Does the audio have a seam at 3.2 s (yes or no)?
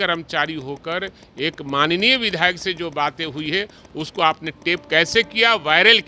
no